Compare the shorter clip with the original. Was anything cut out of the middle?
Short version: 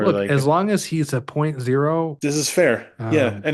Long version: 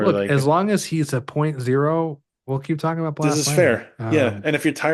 yes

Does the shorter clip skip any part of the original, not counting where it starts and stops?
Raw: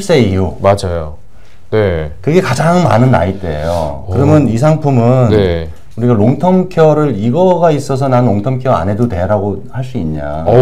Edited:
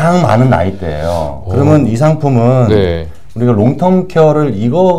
no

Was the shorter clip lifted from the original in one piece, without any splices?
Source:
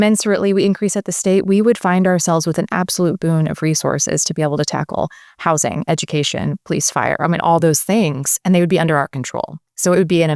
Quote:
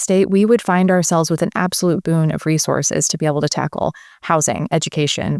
yes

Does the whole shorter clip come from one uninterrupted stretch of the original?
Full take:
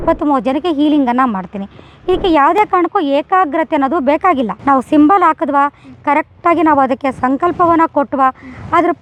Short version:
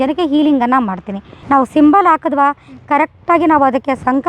no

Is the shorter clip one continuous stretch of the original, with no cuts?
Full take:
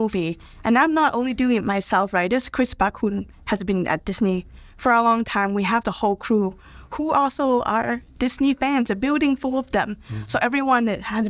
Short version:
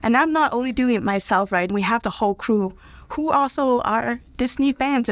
no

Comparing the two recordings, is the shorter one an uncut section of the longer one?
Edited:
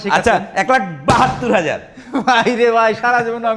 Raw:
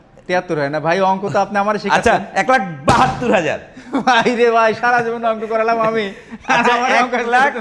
yes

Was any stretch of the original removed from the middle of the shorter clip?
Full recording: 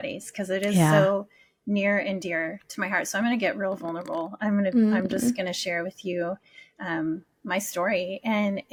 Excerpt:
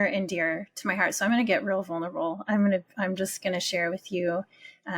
no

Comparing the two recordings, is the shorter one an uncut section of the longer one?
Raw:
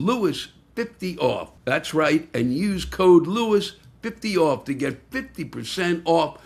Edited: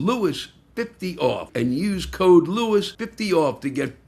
no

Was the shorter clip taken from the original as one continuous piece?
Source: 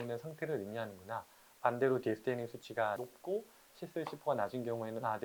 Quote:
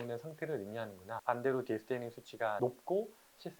no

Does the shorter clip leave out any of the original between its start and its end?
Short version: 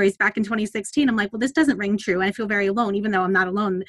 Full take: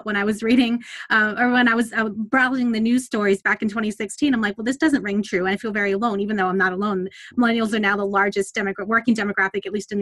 no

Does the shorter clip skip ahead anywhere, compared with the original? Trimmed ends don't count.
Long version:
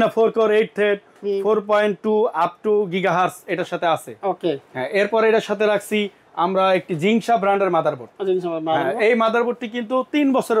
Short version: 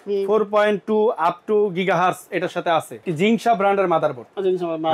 yes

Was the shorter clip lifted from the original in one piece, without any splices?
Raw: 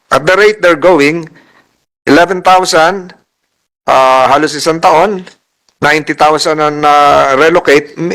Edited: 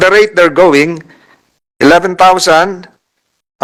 yes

